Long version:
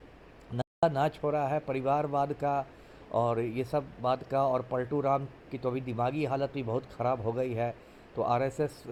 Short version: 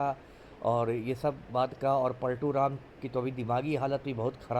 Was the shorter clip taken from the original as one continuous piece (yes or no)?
yes